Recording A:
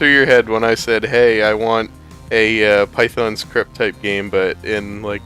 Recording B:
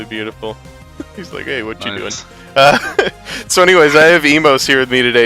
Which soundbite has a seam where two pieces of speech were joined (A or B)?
B